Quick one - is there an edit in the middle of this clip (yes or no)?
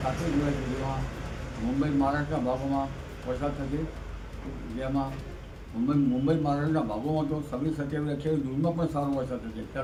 no